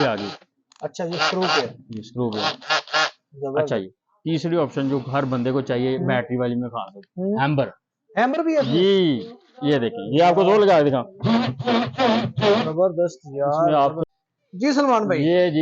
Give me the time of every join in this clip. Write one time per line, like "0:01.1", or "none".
0:14.0